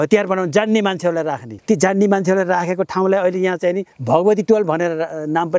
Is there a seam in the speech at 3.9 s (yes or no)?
yes